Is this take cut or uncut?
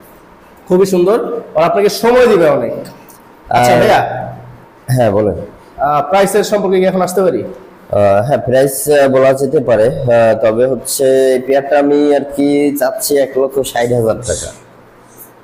uncut